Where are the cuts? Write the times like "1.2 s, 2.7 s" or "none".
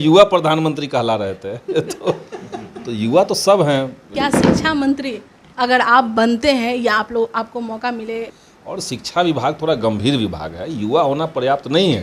4.1 s, 8.3 s

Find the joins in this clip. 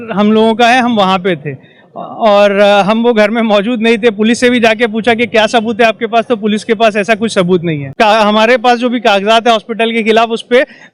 7.9 s

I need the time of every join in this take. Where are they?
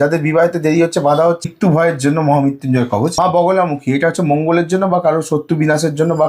1.4 s, 3.1 s

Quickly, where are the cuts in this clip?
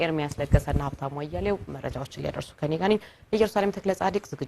none

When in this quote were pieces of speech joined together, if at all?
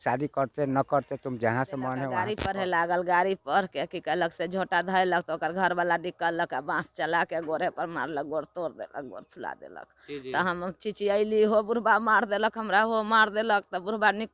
2.2 s

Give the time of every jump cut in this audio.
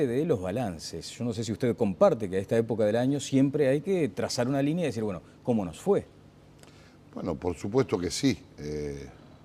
none

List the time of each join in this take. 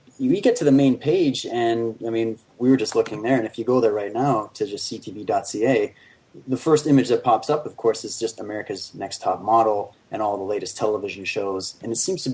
5.0 s

